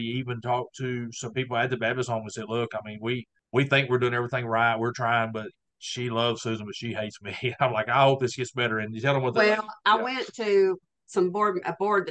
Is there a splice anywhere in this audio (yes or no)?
yes